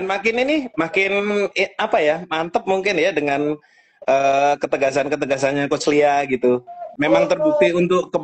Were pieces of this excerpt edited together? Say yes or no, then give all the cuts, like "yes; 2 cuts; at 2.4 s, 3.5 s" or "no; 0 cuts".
yes; 1 cut; at 6.8 s